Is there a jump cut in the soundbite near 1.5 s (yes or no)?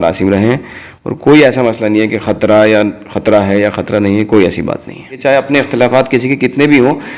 no